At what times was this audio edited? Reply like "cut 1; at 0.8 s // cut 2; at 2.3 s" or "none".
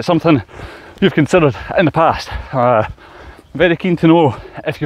none